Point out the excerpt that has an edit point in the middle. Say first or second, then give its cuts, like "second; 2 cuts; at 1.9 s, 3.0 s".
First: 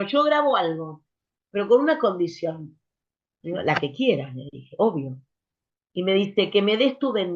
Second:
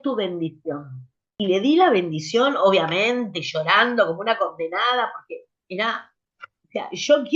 second; 1 cut; at 1.3 s